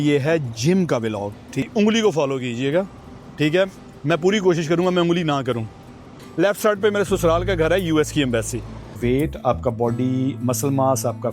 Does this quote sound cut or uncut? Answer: cut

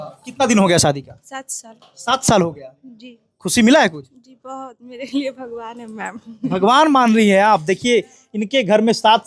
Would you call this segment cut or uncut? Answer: uncut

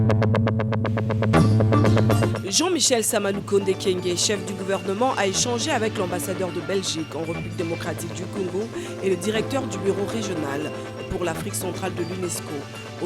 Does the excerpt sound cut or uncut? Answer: cut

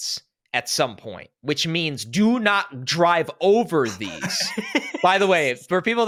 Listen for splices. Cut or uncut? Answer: uncut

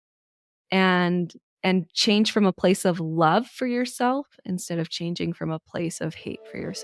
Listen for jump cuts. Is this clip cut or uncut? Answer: uncut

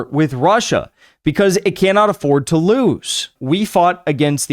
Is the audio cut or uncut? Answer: cut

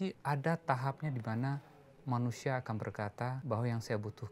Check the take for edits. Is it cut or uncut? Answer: cut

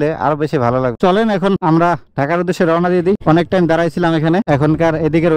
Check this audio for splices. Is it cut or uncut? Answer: uncut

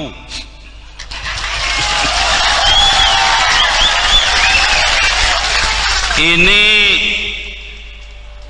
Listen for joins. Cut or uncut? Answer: uncut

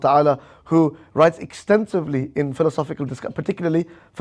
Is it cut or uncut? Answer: uncut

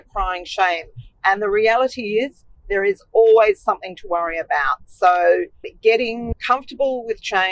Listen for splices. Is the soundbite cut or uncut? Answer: uncut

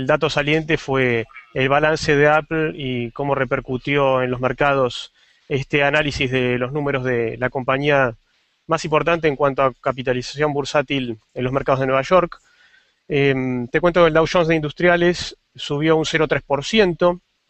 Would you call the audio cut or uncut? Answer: uncut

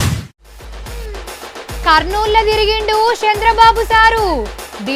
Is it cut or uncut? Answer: cut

